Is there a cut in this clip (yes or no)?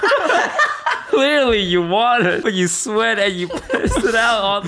yes